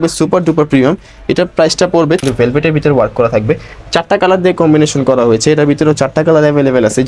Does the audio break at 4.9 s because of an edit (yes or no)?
no